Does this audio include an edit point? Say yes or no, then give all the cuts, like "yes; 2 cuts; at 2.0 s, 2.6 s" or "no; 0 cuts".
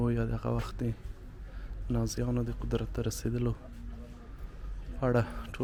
no; 0 cuts